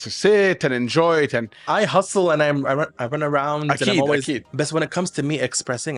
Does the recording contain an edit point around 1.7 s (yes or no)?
yes